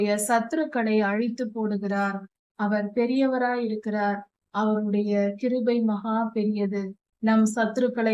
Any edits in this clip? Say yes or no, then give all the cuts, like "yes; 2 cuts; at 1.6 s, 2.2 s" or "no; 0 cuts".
no; 0 cuts